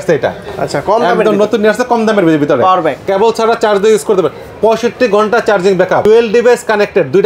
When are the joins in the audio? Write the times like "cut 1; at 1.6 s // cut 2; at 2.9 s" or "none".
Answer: cut 1; at 3.0 s // cut 2; at 6.0 s